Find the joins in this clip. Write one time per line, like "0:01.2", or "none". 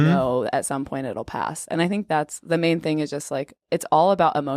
0:03.6